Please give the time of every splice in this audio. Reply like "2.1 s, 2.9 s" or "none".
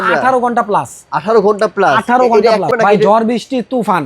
2.7 s

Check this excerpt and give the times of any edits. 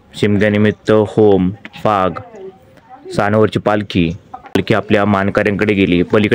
4.6 s

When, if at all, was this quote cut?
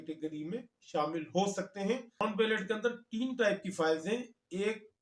2.2 s

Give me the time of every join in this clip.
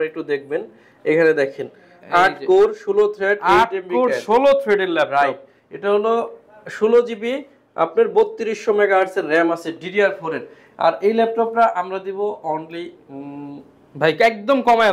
none

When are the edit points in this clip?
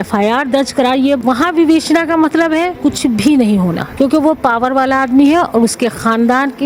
1.2 s, 2.7 s, 3.9 s

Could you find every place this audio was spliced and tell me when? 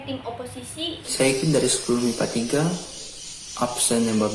1.0 s

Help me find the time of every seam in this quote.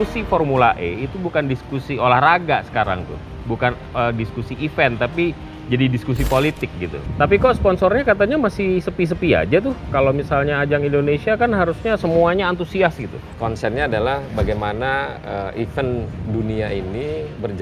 7.0 s, 13.2 s

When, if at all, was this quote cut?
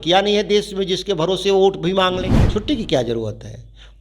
2.4 s

